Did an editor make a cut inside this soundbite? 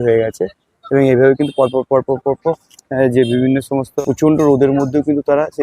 yes; 1 cut; at 3.9 s

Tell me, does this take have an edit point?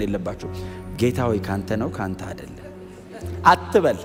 no; 0 cuts

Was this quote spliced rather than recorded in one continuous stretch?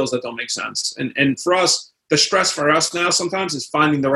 no; 0 cuts

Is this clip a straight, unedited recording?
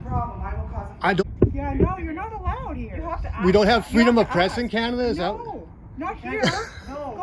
no; 1 cut; at 1.2 s

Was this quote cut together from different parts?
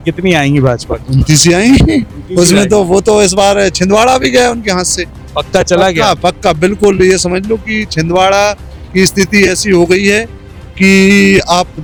no; 0 cuts

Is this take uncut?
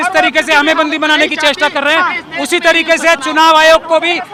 yes; 0 cuts

